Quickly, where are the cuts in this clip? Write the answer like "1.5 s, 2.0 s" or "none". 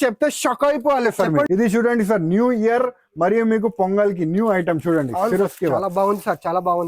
1.5 s